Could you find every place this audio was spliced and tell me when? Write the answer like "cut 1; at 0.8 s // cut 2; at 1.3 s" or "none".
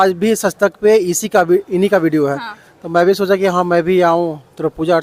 none

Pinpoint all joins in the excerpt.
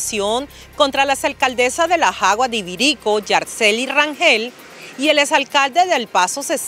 none

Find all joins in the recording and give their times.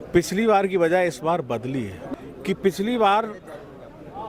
cut 1; at 2.0 s

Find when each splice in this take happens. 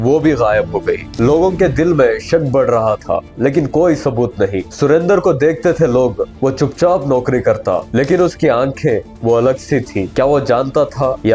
none

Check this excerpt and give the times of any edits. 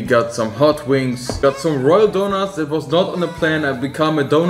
cut 1; at 1.3 s

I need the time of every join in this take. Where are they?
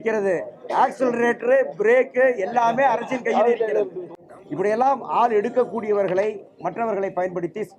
cut 1; at 4.0 s

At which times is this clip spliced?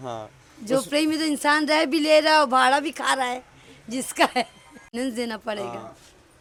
none

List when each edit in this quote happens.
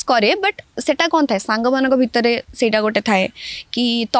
none

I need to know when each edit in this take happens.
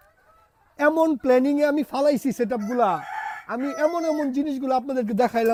none

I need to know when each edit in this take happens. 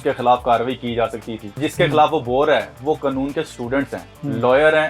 cut 1; at 1.6 s

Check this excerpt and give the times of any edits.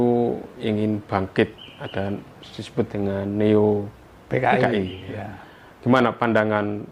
none

